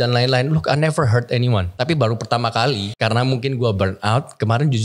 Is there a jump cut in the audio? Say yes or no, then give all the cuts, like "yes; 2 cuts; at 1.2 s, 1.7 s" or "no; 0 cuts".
yes; 2 cuts; at 1.7 s, 2.9 s